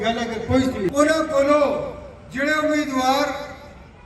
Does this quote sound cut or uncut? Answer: cut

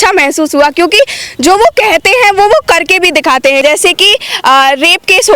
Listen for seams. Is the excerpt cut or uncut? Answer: cut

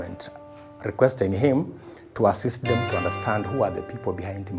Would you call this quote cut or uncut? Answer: uncut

